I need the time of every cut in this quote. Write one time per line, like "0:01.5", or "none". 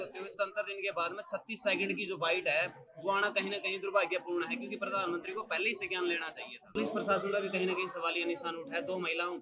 0:06.8